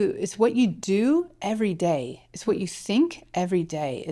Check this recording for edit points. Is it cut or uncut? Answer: uncut